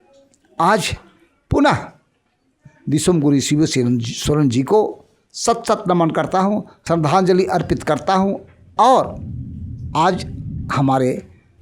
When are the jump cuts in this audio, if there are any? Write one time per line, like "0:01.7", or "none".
0:06.7